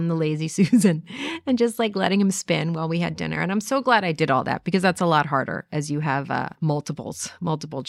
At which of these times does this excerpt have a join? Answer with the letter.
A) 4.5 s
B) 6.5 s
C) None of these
B